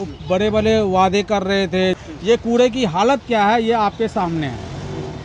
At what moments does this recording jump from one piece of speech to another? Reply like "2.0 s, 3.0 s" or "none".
2.1 s